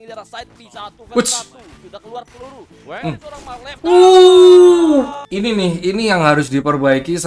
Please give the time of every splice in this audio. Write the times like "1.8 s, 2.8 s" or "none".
5.2 s